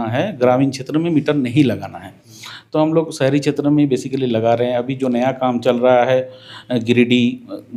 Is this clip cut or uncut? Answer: uncut